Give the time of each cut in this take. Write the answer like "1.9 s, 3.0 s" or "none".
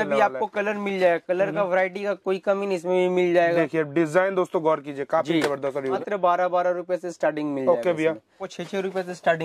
6.0 s, 8.5 s